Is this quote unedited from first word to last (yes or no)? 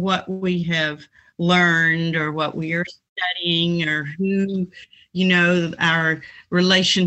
yes